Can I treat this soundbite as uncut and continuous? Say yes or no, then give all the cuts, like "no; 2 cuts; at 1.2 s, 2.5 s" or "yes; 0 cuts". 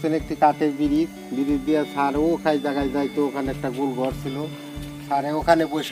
yes; 0 cuts